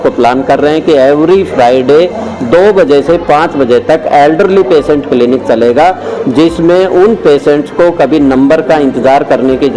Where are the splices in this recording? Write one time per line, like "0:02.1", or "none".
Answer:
none